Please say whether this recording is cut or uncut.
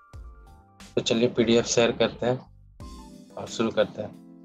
cut